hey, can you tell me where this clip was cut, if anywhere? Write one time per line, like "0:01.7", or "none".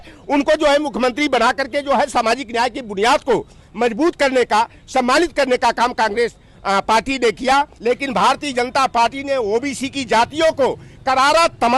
0:07.7